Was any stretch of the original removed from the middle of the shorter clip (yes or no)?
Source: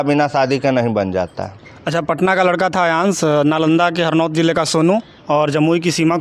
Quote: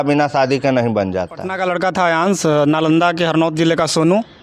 yes